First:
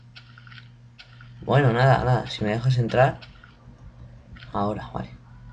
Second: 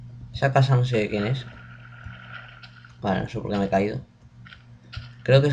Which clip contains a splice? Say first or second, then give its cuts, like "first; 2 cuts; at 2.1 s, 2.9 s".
first; 1 cut; at 3.0 s